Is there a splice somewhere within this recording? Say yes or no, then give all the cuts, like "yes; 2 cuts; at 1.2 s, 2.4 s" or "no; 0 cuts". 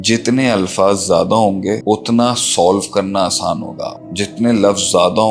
yes; 1 cut; at 1.8 s